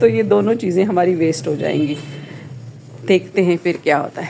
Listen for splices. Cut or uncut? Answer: uncut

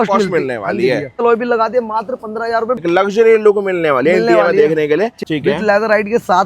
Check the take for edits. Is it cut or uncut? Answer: cut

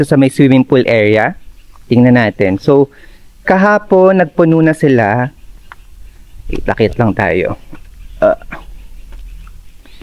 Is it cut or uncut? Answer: uncut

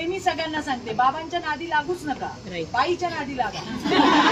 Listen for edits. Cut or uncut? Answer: uncut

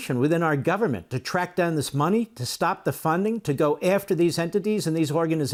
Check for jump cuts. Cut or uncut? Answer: uncut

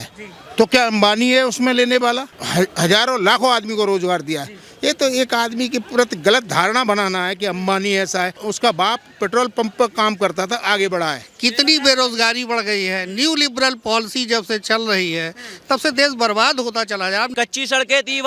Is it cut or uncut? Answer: cut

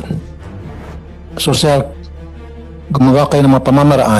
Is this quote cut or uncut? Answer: uncut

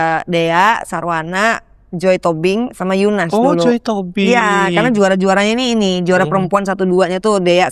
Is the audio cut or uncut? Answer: uncut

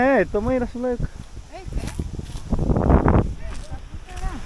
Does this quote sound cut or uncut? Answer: uncut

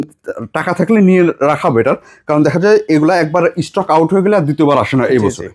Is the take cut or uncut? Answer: uncut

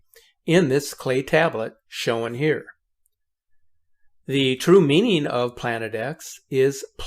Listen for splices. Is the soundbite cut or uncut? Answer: cut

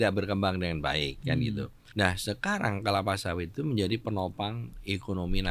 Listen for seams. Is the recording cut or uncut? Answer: cut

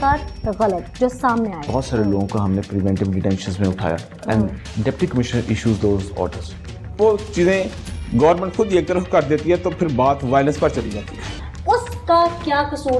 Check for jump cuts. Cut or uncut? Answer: cut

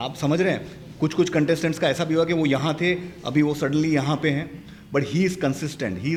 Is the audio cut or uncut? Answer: uncut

